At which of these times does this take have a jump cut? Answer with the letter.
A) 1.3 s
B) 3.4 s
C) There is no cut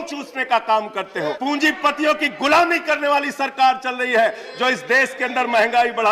A